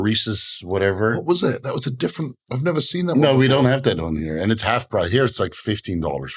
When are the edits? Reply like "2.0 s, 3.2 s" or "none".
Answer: none